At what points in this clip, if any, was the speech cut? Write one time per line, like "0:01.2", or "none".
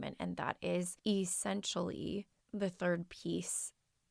0:00.9
0:02.4